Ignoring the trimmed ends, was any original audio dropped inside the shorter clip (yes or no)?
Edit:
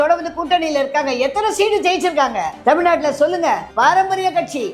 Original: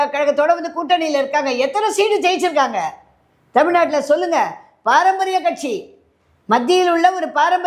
yes